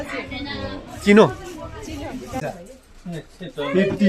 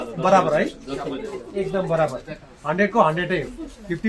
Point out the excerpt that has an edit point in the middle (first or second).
first